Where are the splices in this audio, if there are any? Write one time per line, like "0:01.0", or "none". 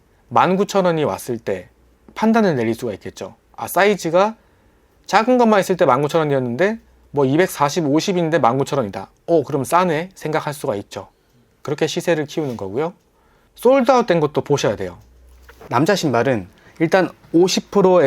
0:15.5